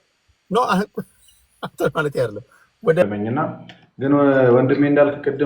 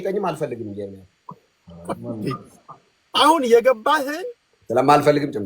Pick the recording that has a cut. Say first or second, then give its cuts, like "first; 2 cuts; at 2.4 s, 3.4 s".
first; 1 cut; at 3.1 s